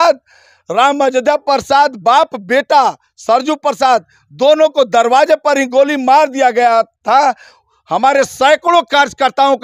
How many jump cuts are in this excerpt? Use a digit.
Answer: 0